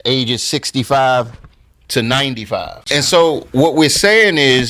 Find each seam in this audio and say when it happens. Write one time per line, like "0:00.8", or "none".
0:02.8